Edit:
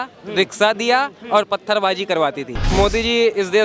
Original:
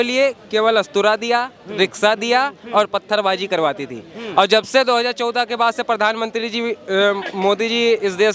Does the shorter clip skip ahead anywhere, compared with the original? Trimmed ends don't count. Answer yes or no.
yes